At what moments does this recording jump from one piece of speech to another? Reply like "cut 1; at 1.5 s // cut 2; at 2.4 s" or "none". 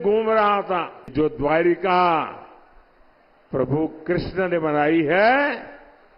cut 1; at 1.1 s